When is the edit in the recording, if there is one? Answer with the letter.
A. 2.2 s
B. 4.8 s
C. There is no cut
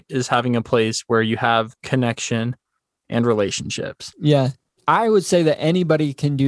B